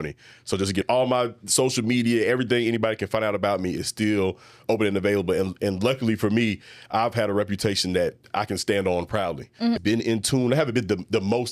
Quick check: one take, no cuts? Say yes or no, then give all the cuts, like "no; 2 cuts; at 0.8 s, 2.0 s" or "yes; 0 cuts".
no; 2 cuts; at 0.8 s, 9.8 s